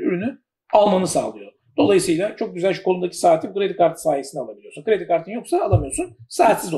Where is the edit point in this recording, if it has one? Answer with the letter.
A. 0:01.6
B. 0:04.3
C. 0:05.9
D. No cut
D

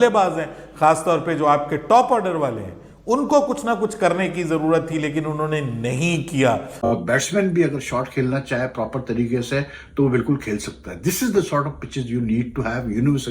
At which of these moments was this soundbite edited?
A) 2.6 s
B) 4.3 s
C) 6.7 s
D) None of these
C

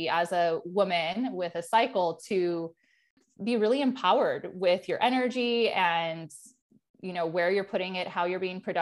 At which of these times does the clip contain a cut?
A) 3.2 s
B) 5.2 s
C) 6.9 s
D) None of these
A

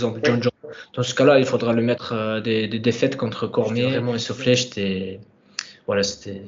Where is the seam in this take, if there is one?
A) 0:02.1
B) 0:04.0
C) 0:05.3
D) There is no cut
B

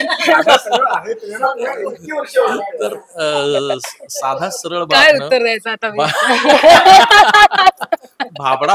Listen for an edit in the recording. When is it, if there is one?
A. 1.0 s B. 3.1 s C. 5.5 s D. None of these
D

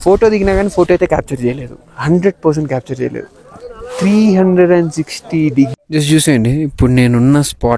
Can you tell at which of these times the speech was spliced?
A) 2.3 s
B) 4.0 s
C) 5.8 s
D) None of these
C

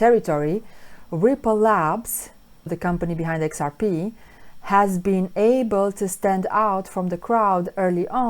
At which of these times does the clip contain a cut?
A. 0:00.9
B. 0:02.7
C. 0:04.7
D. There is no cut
B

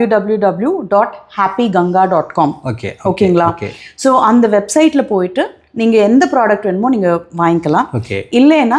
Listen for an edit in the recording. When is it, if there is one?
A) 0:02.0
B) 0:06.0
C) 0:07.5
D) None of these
D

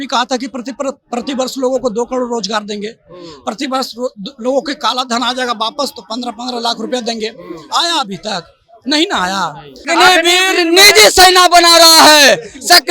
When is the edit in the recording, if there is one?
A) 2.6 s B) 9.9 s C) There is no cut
B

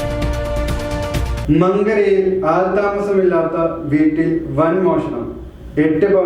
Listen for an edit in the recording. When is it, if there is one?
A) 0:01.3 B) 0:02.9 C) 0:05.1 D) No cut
A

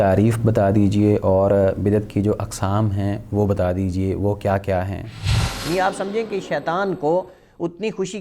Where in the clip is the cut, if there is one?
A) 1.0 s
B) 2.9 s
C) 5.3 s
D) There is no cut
C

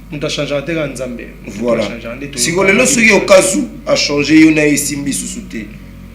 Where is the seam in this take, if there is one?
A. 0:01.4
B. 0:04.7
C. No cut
C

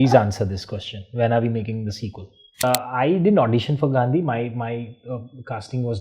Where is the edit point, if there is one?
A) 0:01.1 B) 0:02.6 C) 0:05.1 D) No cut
B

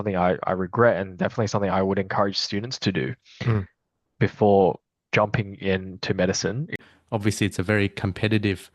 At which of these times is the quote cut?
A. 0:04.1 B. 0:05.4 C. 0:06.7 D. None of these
C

